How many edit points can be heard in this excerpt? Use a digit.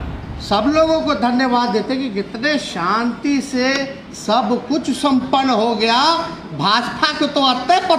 0